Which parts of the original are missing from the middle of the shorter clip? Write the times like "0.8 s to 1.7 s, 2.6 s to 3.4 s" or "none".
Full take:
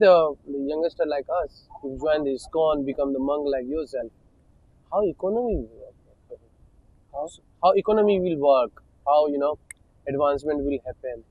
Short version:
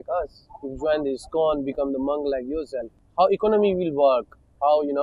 4.2 s to 7.4 s